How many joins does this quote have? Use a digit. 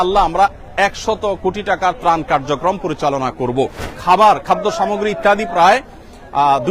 1